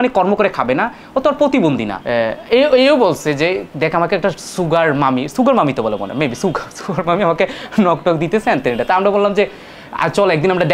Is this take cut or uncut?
cut